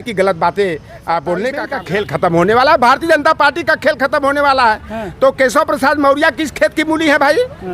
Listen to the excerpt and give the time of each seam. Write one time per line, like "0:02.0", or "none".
0:01.6